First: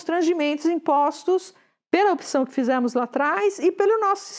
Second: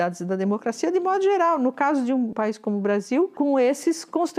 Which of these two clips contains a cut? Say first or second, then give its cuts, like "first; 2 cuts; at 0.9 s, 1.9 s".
second; 2 cuts; at 2.3 s, 3.3 s